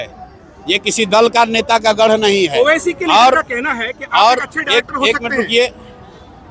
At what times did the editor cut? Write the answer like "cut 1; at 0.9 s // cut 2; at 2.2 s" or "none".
none